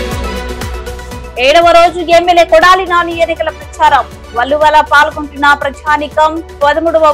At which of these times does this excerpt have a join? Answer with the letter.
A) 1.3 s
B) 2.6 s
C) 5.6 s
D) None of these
A